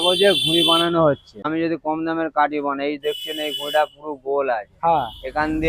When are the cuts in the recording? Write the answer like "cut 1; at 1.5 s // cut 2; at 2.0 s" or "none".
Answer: cut 1; at 1.5 s